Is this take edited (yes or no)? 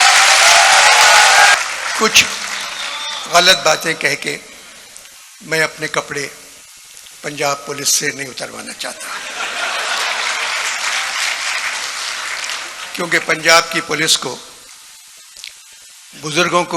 yes